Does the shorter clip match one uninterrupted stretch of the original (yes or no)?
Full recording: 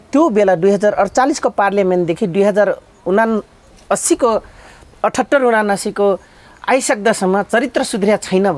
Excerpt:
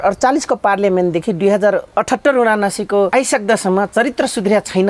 no